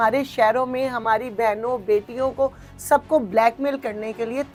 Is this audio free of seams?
yes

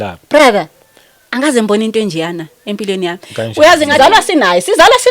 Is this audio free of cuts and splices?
no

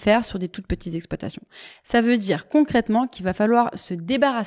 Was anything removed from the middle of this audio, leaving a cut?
no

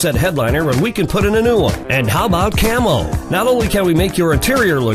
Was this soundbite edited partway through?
no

